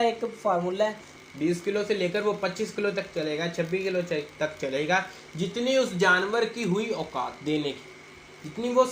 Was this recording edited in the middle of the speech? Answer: yes; 1 cut; at 1.1 s

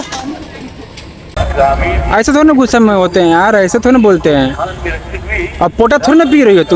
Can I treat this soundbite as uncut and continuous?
no; 1 cut; at 1.3 s

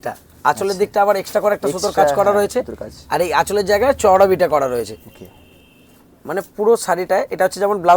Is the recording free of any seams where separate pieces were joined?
yes; 0 cuts

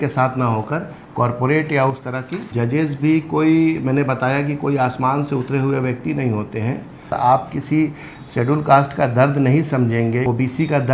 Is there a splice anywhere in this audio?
yes; 3 cuts; at 2.5 s, 7.1 s, 10.3 s

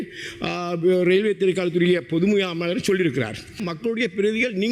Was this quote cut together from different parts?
yes; 1 cut; at 3.7 s

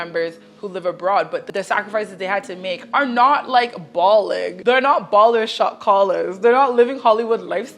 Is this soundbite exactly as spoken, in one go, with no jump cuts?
no; 2 cuts; at 1.5 s, 4.5 s

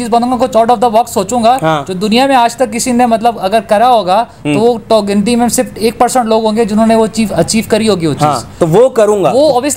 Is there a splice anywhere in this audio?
no; 0 cuts

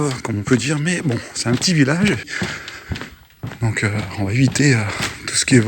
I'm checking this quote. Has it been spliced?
yes; 1 cut; at 2.3 s

